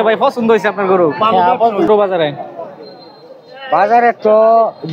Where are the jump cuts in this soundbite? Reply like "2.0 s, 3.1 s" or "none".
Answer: 1.9 s